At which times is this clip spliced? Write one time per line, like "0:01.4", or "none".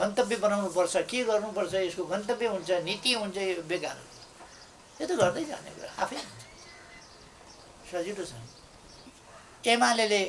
0:09.1